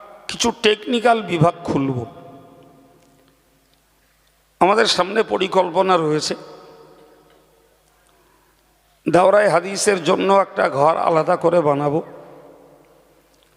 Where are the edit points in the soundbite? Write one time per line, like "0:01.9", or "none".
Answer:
none